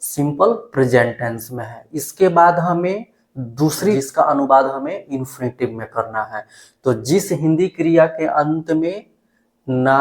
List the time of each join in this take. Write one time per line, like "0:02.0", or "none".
0:04.0